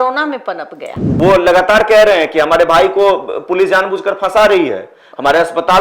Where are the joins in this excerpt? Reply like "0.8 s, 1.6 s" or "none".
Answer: 1.1 s